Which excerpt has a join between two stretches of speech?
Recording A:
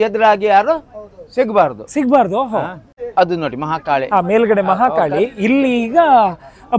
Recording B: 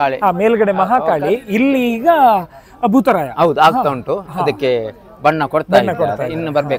A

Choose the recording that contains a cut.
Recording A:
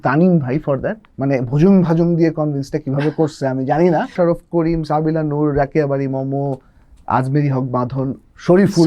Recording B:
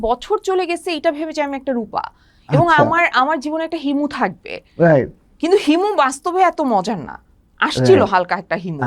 A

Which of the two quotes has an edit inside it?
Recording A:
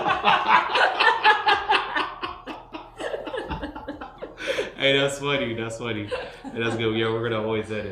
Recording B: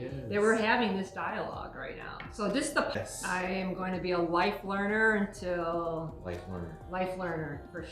B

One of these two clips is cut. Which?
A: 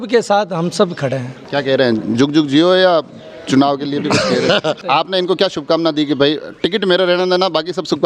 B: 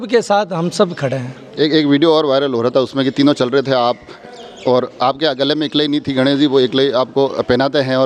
A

